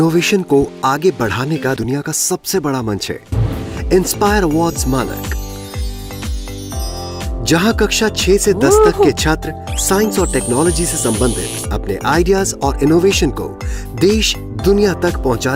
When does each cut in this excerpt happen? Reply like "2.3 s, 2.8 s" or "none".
none